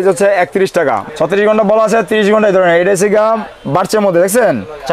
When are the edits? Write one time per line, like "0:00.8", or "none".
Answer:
0:01.0

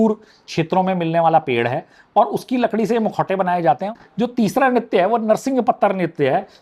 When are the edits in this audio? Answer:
0:03.9

